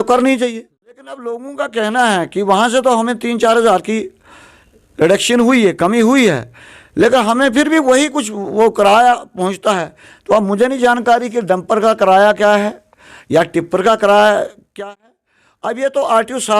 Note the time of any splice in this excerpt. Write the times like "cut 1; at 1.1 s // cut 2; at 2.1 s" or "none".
cut 1; at 1.1 s